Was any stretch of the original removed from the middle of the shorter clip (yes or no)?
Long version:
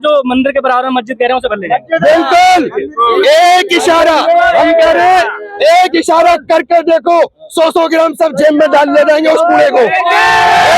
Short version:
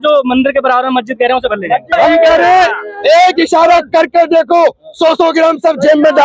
yes